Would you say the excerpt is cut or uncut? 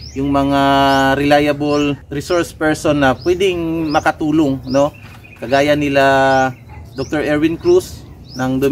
uncut